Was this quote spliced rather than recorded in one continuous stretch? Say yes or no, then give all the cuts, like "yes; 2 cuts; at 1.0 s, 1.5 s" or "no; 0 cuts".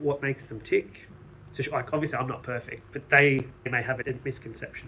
yes; 1 cut; at 1.0 s